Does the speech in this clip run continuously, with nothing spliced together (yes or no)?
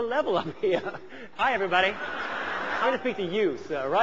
no